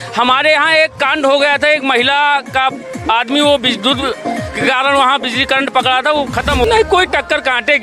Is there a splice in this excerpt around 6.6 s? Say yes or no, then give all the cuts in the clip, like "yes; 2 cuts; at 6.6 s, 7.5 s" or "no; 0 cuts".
yes; 1 cut; at 6.6 s